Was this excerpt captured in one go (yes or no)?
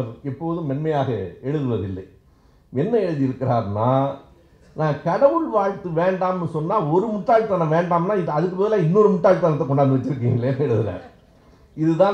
yes